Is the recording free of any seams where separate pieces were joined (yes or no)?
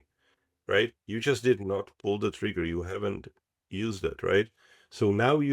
yes